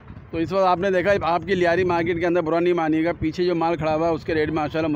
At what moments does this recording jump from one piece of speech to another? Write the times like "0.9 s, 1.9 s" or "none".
none